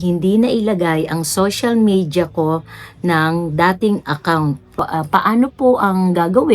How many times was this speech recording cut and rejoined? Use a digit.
1